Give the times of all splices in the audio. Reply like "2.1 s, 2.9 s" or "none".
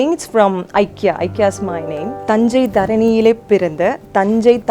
2.1 s